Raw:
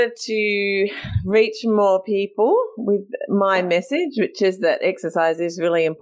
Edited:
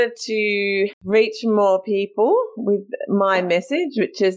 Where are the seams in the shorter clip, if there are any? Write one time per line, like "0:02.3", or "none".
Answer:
0:01.0